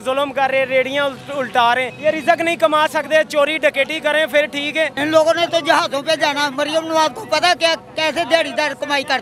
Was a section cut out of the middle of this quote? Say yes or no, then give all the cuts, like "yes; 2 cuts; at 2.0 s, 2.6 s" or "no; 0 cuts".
yes; 2 cuts; at 1.9 s, 5.0 s